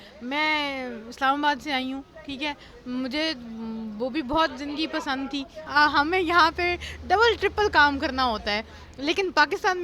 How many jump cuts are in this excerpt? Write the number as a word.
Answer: one